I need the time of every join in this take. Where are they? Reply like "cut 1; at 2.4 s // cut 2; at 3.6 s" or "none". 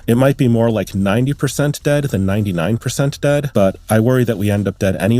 cut 1; at 3.5 s